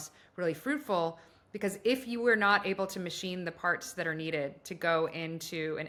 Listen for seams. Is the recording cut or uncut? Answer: uncut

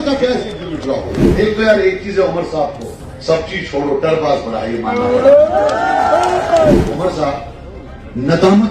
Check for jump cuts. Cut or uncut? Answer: cut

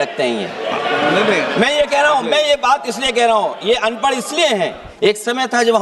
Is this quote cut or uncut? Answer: cut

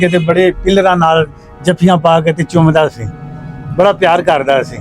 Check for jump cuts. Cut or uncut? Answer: uncut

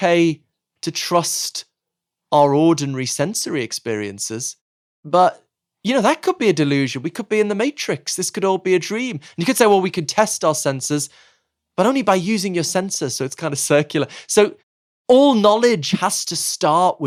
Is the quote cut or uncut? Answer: uncut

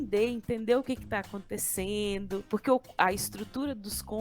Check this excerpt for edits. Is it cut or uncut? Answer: cut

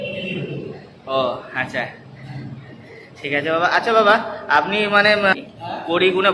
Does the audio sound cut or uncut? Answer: cut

